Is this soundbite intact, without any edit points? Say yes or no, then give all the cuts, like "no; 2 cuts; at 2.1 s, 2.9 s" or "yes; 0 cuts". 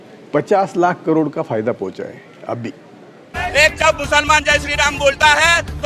no; 1 cut; at 3.2 s